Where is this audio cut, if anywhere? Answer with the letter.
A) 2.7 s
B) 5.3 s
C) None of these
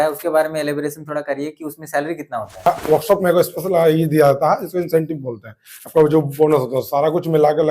A